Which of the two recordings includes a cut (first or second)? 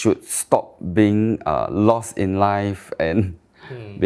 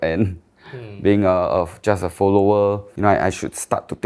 second